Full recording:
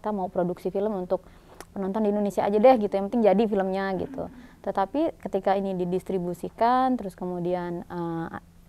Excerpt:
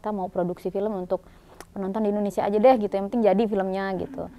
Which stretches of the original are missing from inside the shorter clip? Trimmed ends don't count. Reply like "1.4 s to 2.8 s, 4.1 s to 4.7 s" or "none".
none